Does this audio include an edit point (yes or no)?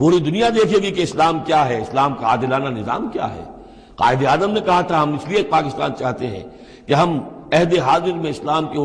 no